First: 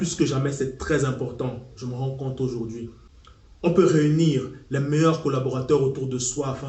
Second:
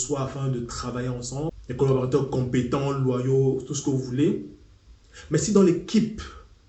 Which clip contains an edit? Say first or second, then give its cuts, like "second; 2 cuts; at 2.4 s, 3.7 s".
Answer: second; 1 cut; at 1.5 s